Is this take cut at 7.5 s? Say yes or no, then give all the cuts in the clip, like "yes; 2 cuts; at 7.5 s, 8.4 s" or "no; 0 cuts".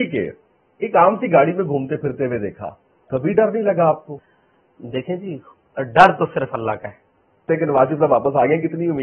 yes; 2 cuts; at 4.2 s, 7.5 s